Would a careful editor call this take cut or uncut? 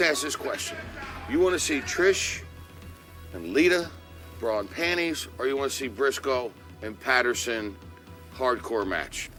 uncut